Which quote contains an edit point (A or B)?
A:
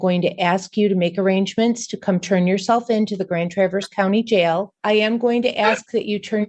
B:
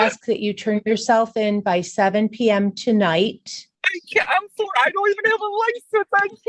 A